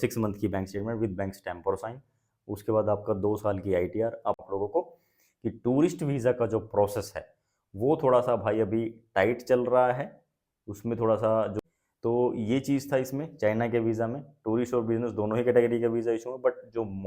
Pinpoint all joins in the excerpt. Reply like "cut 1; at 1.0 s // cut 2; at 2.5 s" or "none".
cut 1; at 4.4 s // cut 2; at 11.6 s